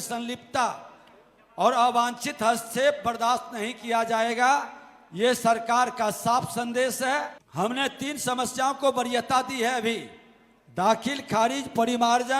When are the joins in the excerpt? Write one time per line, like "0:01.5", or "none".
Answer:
0:07.4